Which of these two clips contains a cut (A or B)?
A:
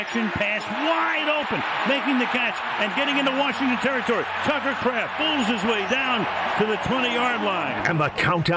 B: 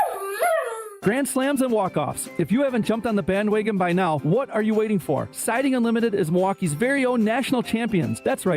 B